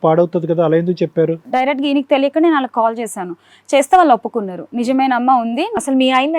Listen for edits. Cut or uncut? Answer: cut